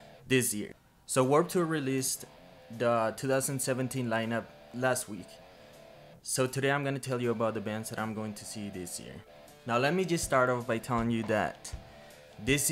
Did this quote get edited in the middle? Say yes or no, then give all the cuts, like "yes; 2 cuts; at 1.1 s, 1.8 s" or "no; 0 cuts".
no; 0 cuts